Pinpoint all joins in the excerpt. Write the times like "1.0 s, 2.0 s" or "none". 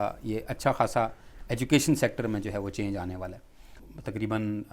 3.8 s